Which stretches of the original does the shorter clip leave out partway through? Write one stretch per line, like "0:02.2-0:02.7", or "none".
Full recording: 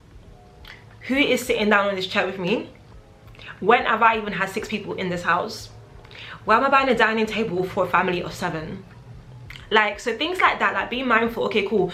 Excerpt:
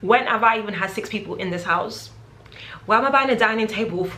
none